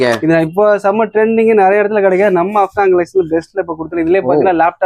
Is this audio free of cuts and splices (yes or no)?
yes